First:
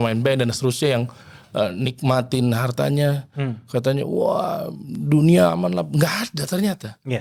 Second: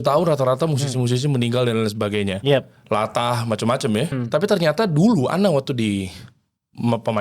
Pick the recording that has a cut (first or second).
second